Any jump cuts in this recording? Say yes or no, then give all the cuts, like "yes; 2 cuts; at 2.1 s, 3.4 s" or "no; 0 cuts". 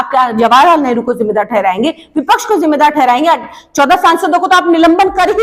no; 0 cuts